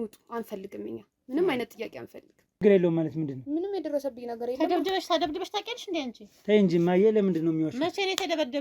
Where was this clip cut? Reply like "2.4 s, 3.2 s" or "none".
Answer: 2.6 s